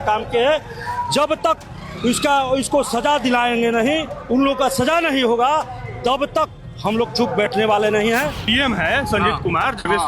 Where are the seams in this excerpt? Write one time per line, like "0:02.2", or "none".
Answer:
0:08.4